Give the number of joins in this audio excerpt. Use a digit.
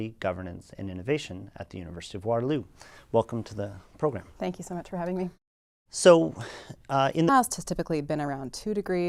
0